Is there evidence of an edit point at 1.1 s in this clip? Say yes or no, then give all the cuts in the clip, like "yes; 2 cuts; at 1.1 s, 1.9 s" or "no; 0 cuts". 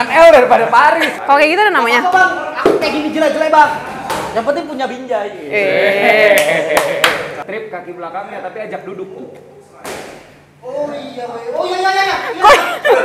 yes; 2 cuts; at 1.1 s, 7.3 s